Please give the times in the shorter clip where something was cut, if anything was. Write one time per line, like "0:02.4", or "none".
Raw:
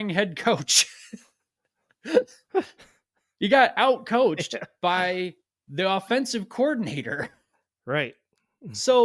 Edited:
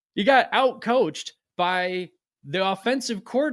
none